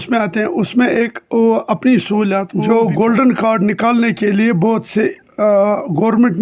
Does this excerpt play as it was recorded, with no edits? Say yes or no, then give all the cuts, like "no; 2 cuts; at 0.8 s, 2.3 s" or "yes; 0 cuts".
no; 1 cut; at 2.5 s